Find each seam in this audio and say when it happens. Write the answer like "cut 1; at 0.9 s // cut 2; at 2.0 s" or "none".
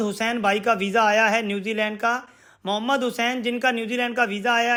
none